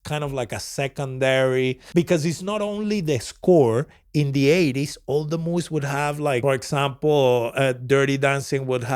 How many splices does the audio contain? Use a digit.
2